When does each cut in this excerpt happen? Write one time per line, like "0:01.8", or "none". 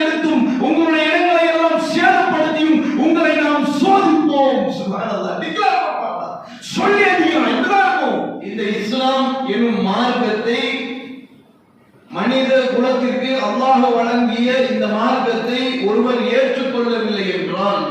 0:08.4